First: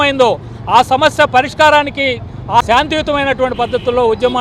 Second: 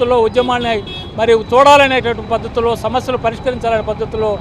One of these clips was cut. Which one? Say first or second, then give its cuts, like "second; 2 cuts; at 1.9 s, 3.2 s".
first; 1 cut; at 2.6 s